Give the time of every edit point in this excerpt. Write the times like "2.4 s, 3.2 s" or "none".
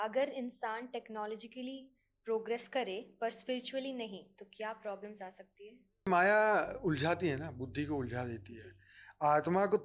6.1 s